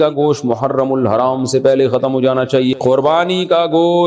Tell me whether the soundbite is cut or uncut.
cut